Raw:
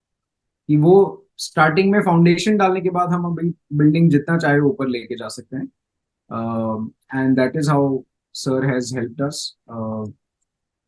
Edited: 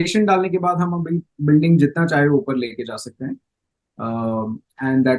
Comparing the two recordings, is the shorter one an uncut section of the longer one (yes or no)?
yes